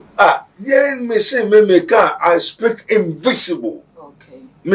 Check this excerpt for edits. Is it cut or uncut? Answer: uncut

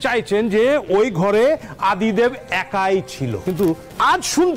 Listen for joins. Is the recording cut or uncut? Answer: cut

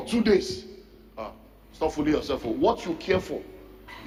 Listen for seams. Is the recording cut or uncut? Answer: uncut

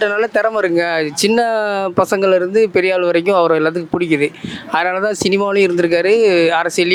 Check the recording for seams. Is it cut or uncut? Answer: uncut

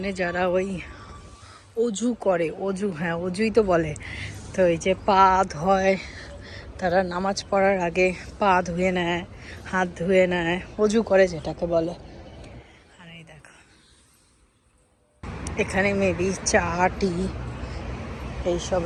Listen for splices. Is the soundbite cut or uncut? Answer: uncut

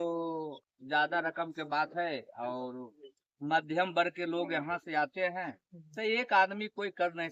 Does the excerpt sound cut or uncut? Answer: uncut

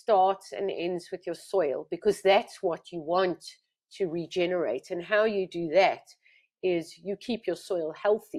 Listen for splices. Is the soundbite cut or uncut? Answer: uncut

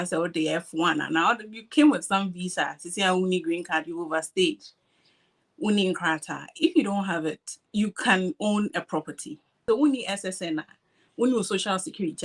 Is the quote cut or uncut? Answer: cut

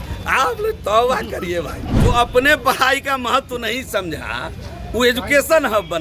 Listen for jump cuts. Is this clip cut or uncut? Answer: cut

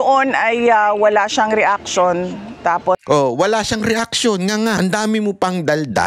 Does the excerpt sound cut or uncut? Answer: cut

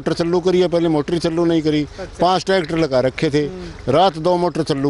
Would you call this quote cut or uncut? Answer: uncut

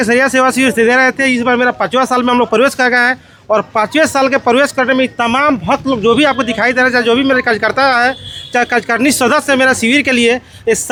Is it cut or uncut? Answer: uncut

